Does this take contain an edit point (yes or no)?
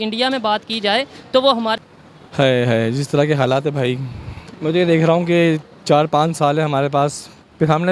yes